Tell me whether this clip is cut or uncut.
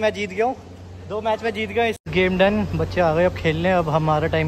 cut